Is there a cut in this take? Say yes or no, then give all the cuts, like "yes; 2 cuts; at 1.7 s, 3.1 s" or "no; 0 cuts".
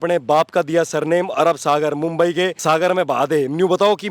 yes; 1 cut; at 2.6 s